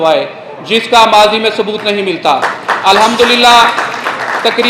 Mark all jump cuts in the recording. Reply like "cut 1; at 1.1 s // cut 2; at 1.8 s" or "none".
none